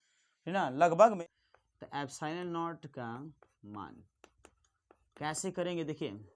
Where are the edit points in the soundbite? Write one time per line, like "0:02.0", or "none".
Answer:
0:01.2